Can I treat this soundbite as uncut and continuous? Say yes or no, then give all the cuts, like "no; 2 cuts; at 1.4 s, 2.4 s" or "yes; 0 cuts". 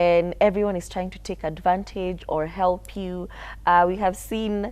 yes; 0 cuts